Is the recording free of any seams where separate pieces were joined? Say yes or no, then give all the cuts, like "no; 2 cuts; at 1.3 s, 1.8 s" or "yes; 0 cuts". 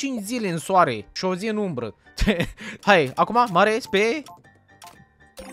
no; 2 cuts; at 1.1 s, 2.8 s